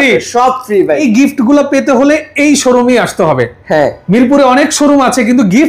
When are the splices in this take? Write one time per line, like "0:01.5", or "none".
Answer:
0:01.0